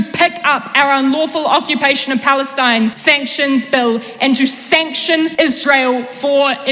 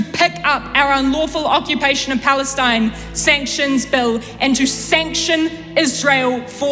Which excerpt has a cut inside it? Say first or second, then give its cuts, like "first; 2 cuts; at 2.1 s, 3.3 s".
first; 2 cuts; at 3.0 s, 5.3 s